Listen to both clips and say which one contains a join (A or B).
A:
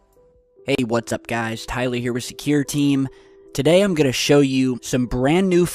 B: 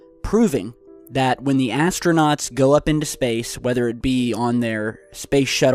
B